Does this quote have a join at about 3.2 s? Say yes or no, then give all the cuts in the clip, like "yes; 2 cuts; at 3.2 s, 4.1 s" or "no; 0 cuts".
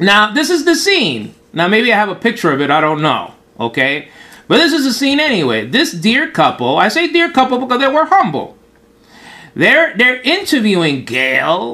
yes; 1 cut; at 3.2 s